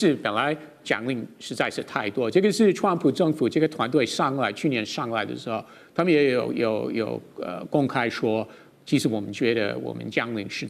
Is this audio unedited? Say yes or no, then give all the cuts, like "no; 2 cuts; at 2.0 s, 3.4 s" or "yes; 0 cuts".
yes; 0 cuts